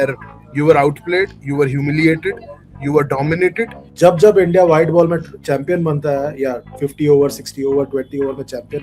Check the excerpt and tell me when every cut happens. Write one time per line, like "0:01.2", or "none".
0:03.9